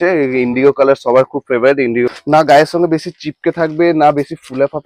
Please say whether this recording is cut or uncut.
cut